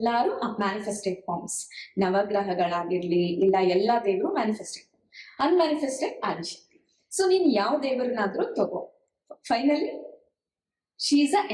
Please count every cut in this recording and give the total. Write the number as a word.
zero